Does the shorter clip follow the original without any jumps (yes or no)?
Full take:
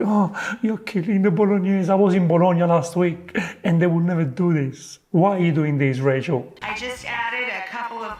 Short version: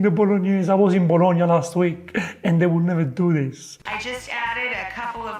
no